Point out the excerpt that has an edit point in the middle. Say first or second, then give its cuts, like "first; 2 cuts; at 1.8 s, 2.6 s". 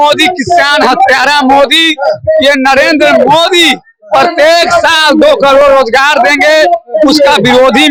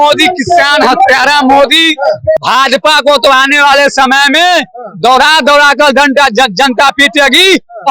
second; 1 cut; at 2.4 s